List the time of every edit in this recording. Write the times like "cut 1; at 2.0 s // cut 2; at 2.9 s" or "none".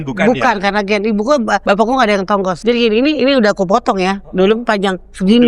cut 1; at 1.6 s // cut 2; at 2.6 s